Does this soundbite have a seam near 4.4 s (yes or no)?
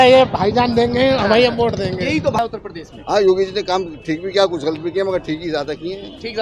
no